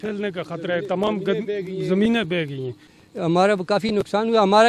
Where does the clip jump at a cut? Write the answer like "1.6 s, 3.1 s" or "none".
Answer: 2.7 s